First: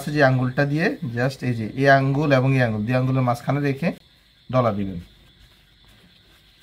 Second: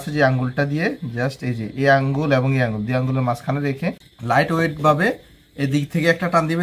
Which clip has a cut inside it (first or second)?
second